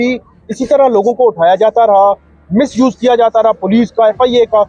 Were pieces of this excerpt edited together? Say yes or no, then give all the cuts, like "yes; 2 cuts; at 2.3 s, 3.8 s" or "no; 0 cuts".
no; 0 cuts